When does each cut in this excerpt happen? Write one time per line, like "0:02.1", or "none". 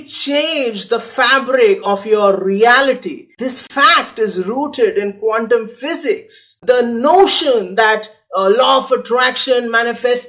0:03.3
0:06.5